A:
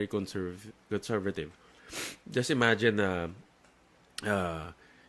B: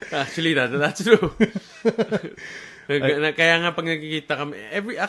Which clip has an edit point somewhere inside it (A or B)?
B